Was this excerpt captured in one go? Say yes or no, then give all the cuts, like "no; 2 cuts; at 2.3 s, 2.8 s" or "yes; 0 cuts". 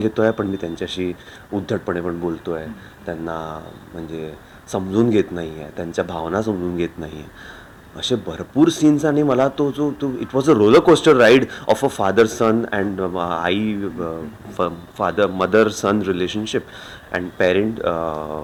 yes; 0 cuts